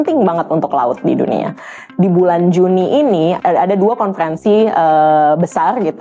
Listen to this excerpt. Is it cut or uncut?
cut